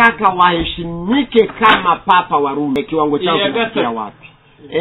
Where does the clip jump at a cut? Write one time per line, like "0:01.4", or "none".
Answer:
0:02.8